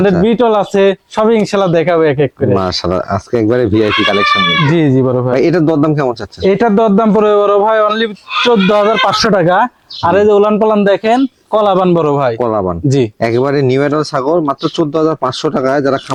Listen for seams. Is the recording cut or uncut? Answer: uncut